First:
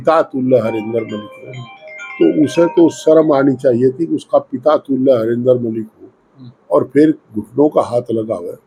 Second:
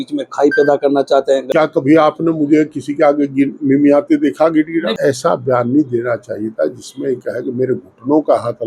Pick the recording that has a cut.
second; 2 cuts; at 1.5 s, 4.9 s

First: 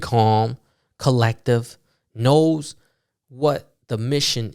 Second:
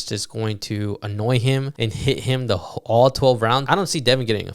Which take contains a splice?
second; 2 cuts; at 1.7 s, 3.6 s

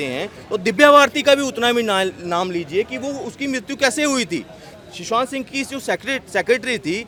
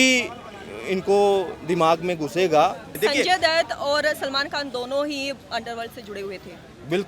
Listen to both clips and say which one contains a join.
second; 1 cut; at 2.9 s

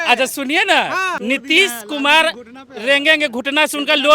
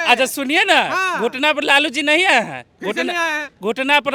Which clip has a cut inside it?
first; 1 cut; at 1.1 s

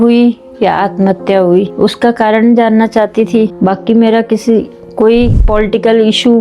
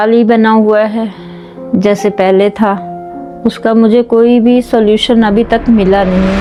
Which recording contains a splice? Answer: first; 3 cuts; at 1.7 s, 3.5 s, 5.4 s

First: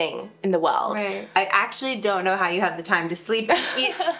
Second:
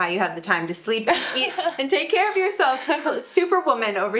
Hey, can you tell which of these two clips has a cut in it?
first; 1 cut; at 1.3 s

